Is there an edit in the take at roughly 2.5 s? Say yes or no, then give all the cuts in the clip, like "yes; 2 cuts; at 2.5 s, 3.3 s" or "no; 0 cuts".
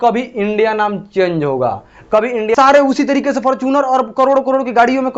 yes; 1 cut; at 2.5 s